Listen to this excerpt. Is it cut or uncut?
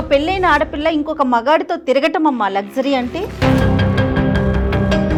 uncut